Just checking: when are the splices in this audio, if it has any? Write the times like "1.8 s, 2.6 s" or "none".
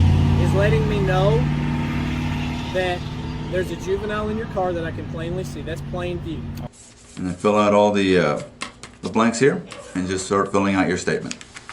6.7 s